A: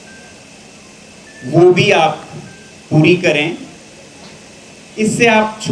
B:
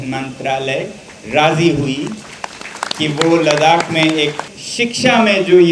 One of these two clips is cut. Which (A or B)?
B